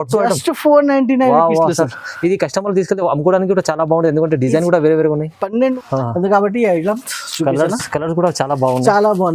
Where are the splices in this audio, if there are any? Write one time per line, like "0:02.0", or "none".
0:05.7